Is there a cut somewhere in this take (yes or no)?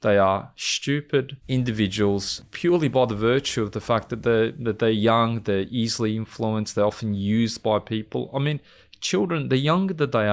yes